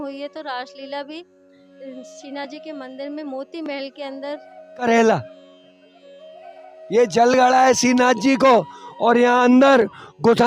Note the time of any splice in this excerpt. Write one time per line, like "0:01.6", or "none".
0:04.8